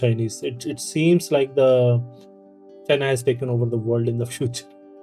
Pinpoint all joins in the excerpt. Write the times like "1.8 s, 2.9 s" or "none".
none